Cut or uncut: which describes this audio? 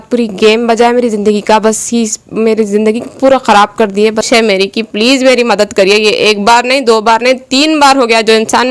cut